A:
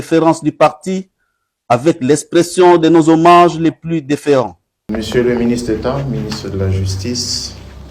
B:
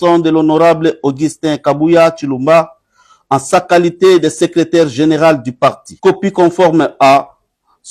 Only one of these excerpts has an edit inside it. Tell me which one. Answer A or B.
A